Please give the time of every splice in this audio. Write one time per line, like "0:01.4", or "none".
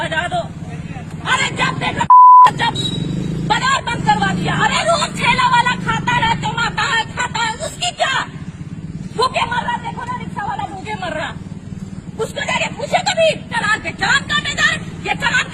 0:13.5